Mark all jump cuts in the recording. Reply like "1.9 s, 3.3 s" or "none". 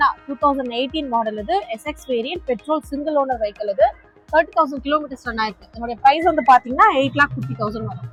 none